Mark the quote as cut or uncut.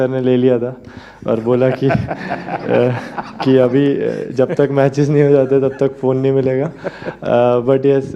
uncut